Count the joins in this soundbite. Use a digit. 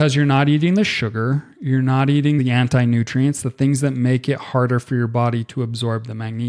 1